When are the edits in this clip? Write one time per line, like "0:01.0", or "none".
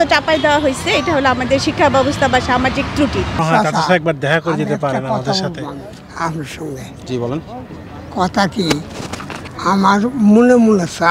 0:03.3